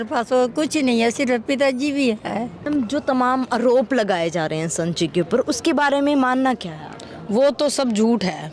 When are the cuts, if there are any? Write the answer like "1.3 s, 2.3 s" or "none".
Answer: 2.7 s